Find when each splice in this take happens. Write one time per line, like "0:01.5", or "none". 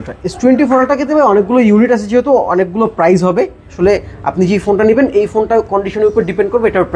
0:03.6